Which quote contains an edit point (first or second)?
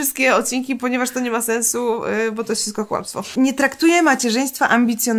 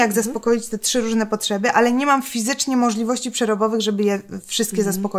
first